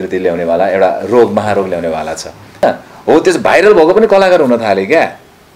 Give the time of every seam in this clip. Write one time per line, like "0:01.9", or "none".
0:02.6